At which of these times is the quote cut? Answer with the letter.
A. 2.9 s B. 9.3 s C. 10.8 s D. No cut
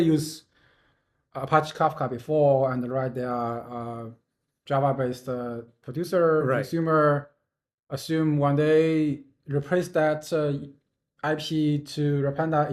D